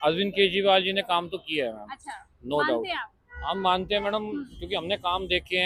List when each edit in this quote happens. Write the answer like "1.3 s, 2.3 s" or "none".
none